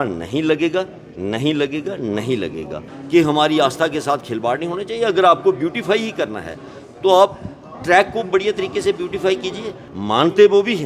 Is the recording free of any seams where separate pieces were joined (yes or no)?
no